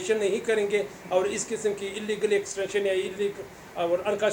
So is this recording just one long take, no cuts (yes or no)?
yes